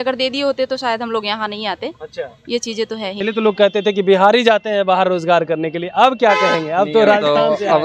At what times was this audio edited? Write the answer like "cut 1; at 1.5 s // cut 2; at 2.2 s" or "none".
cut 1; at 3.2 s